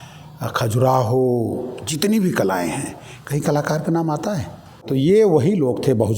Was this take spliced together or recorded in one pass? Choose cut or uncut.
cut